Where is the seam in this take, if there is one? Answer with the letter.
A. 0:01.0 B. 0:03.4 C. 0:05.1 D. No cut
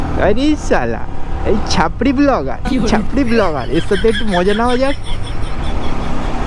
D